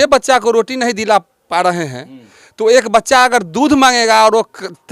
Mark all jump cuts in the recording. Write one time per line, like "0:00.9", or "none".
none